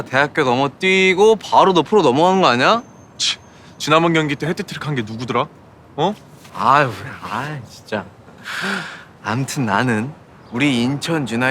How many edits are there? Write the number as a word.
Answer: one